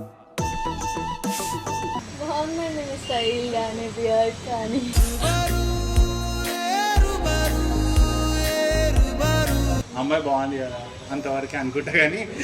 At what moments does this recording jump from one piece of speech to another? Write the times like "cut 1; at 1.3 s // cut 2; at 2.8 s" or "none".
cut 1; at 9.8 s